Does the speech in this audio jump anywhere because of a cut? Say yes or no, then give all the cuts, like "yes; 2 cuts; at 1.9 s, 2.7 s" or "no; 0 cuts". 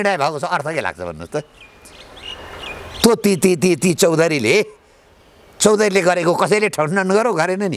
no; 0 cuts